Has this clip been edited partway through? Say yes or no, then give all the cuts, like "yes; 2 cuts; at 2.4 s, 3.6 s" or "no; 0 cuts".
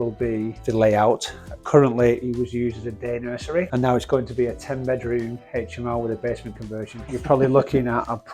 yes; 2 cuts; at 3.7 s, 7.0 s